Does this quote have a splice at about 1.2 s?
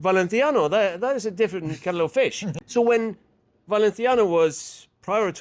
no; 1 cut; at 2.5 s

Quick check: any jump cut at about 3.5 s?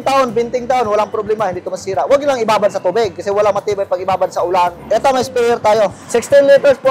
no; 2 cuts; at 4.8 s, 6.0 s

